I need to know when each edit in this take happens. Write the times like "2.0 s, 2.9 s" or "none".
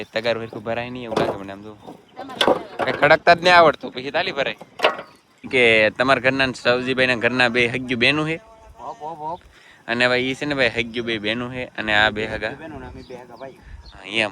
5.5 s